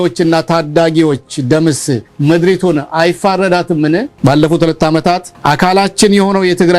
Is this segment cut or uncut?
cut